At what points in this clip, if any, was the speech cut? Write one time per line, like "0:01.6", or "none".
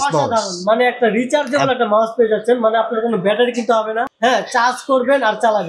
0:04.1